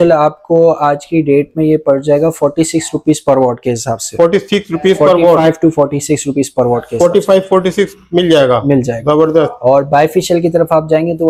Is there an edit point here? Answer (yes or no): no